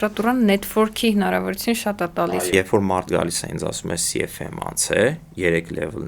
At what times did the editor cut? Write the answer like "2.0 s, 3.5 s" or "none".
2.4 s